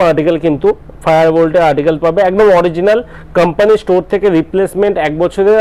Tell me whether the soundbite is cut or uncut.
uncut